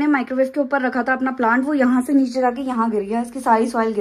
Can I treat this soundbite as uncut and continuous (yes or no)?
yes